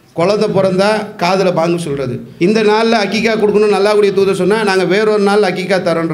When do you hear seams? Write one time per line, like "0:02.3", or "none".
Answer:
0:02.2